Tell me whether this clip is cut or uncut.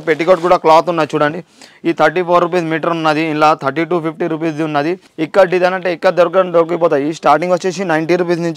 cut